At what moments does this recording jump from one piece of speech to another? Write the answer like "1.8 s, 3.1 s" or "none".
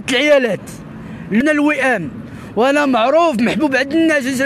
1.4 s